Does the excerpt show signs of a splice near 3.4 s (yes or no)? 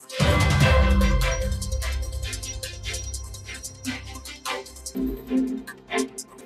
no